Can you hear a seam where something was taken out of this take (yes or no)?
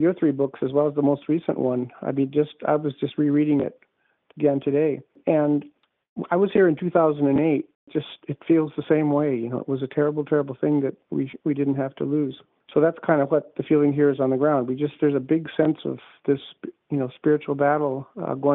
no